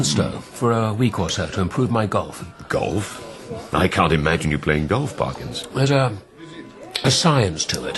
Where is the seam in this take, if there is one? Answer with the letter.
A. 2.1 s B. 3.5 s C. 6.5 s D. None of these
A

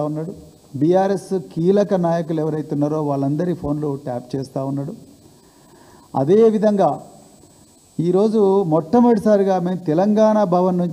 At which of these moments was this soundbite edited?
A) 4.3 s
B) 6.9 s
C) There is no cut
C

